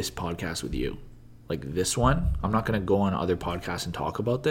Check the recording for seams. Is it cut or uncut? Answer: uncut